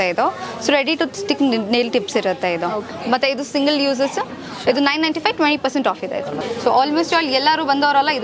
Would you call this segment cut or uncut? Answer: cut